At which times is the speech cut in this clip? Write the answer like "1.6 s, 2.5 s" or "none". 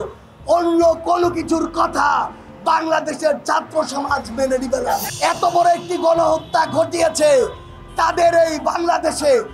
5.1 s